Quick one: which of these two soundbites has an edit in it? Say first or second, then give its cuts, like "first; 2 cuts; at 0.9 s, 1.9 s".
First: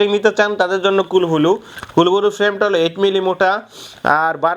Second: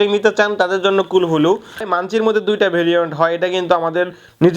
second; 1 cut; at 1.8 s